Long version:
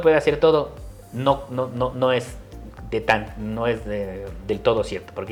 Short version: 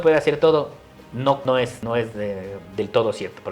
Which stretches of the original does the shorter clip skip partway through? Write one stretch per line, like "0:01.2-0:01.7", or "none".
0:01.5-0:03.2